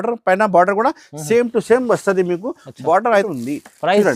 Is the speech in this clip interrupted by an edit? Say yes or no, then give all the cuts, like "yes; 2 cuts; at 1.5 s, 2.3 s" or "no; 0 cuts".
yes; 1 cut; at 3.2 s